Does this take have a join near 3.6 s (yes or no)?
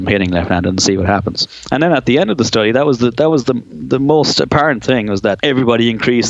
no